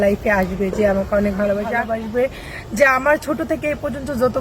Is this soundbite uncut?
no; 1 cut; at 1.8 s

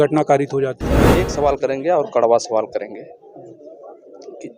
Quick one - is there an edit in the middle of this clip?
yes; 1 cut; at 1.3 s

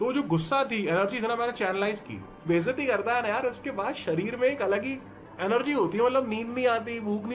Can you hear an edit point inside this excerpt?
yes; 1 cut; at 2.4 s

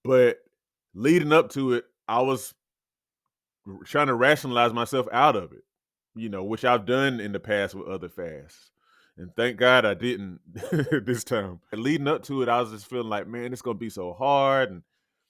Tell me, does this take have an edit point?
yes; 1 cut; at 11.8 s

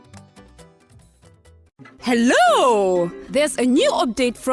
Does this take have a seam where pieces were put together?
yes; 1 cut; at 1.6 s

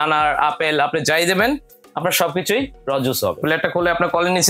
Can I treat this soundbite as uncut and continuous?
no; 1 cut; at 3.4 s

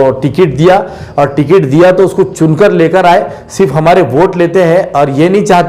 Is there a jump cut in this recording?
no; 0 cuts

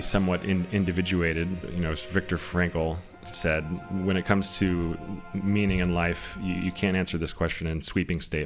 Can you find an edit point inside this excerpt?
yes; 2 cuts; at 1.6 s, 3.8 s

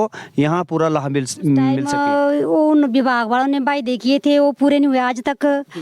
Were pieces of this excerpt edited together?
yes; 1 cut; at 1.9 s

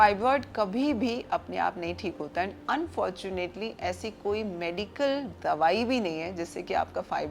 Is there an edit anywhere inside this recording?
no; 0 cuts

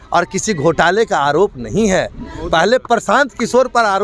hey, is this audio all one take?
yes; 0 cuts

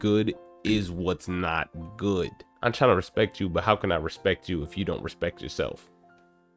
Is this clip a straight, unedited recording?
no; 1 cut; at 2.5 s

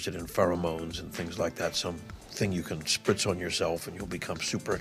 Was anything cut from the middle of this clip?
no; 0 cuts

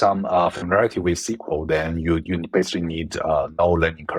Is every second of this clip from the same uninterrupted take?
yes; 0 cuts

